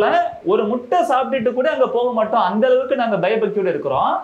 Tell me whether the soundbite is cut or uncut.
uncut